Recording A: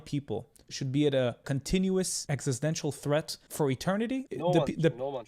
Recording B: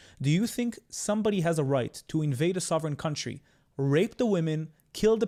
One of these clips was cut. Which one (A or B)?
A